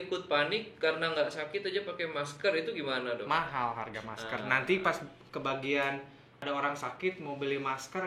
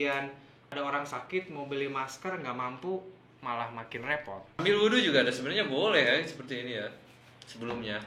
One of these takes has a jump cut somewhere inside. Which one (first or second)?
second